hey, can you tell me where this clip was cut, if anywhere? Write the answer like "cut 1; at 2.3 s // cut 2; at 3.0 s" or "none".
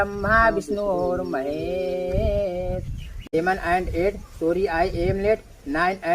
cut 1; at 3.1 s